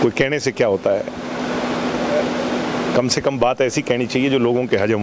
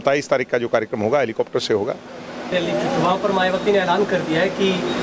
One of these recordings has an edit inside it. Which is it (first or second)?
second